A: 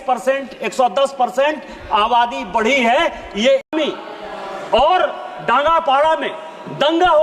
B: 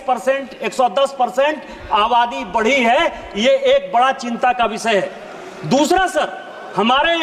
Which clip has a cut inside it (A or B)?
A